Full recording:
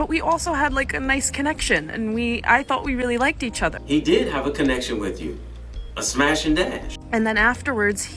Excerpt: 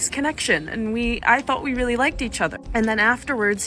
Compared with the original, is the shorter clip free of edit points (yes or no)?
no